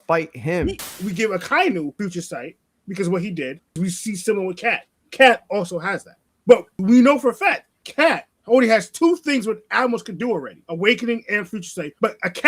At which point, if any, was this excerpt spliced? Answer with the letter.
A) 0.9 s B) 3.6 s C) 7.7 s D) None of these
A